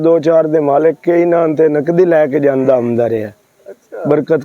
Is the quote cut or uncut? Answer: uncut